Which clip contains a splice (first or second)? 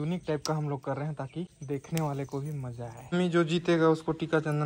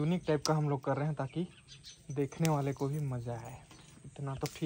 first